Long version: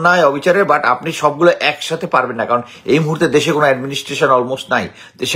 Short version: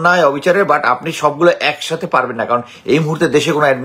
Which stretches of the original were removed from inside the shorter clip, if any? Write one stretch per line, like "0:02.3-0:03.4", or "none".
none

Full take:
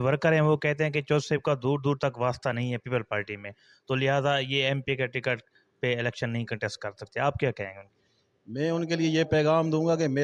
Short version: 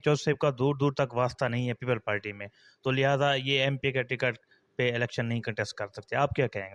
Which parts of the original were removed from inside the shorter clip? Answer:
none

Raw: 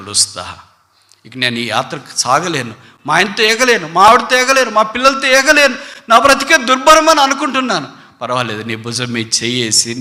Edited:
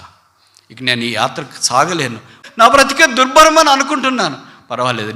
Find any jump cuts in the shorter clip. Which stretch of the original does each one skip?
0:02.9-0:05.9

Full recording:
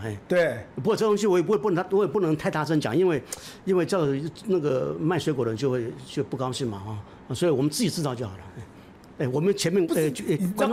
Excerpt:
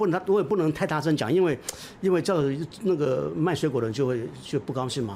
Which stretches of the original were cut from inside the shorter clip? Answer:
none

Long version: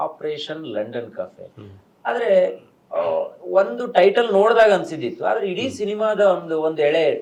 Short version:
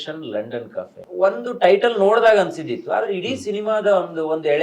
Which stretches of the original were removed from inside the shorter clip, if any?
0:01.5-0:03.4

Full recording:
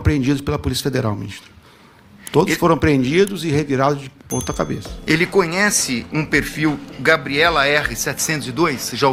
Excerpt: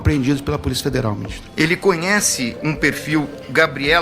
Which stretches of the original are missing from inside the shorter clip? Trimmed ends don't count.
0:01.4-0:04.9

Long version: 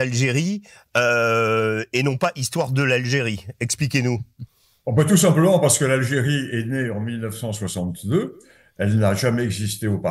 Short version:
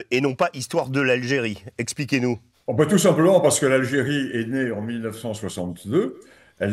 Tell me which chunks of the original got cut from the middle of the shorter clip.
0:04.3-0:04.7

